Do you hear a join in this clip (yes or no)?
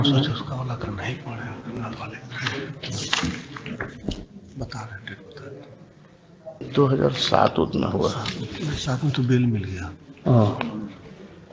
yes